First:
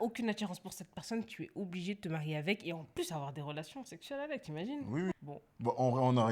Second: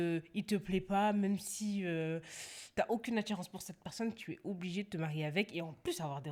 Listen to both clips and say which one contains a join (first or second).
first